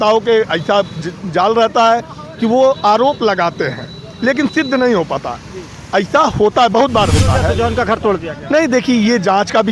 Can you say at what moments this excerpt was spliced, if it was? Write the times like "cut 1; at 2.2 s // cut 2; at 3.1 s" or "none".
cut 1; at 7.5 s